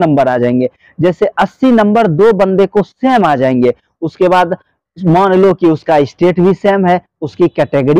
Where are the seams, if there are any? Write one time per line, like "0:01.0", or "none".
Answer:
none